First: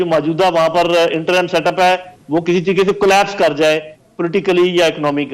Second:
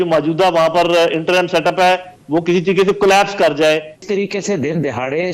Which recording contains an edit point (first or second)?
second